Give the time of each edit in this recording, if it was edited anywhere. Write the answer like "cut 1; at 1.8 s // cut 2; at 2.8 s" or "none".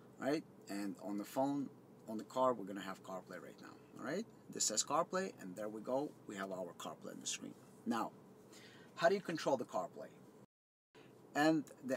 cut 1; at 11.0 s